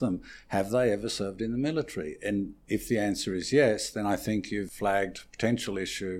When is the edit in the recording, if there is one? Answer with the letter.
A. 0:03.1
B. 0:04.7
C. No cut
B